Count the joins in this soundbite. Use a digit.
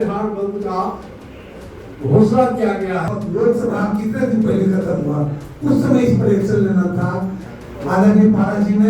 2